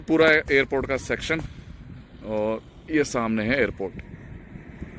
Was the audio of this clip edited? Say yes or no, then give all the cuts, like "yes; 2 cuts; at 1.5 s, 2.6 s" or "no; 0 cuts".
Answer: no; 0 cuts